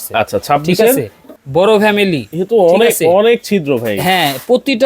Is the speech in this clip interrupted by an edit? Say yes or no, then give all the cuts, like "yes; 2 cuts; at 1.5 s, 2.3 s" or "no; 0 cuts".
yes; 1 cut; at 1.3 s